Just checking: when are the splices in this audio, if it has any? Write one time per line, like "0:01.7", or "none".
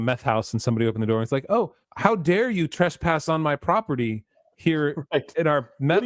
0:01.8